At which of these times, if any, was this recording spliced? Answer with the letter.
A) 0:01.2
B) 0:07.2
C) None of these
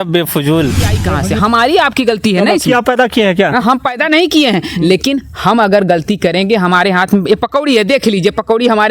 A